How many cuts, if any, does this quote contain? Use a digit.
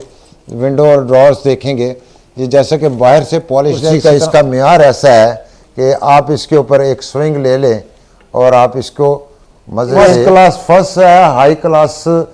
2